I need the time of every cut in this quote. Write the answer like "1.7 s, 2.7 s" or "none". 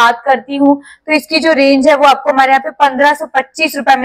none